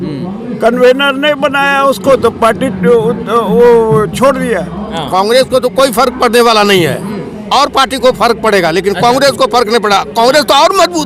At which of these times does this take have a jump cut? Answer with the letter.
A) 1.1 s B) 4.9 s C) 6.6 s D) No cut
B